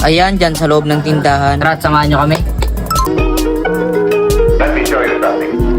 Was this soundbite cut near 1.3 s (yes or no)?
no